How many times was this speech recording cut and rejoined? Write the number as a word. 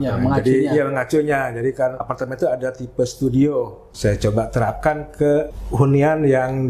three